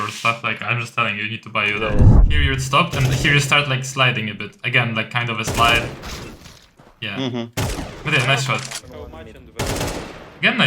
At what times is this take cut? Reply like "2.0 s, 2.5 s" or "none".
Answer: 2.2 s, 8.8 s